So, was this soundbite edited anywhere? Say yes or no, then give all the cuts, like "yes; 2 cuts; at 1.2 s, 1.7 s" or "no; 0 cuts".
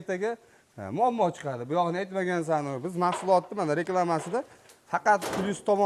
no; 0 cuts